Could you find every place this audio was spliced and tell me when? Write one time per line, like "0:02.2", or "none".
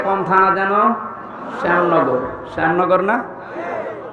none